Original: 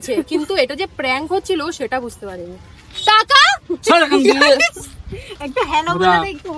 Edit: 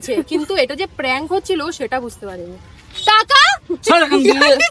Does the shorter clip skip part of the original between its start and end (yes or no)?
no